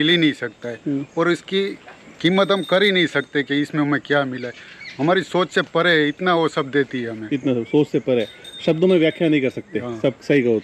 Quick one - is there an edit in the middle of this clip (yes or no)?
no